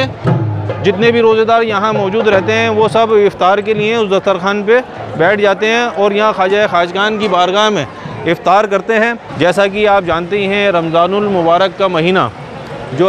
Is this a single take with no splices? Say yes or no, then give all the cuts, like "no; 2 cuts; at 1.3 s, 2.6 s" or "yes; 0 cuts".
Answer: no; 1 cut; at 9.2 s